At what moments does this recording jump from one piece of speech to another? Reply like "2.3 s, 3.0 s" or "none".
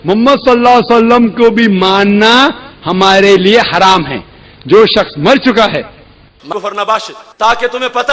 6.5 s